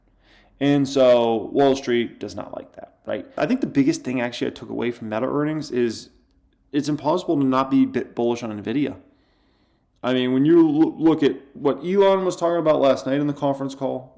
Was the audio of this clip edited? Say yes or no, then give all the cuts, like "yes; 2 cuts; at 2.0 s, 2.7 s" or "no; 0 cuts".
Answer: yes; 1 cut; at 3.4 s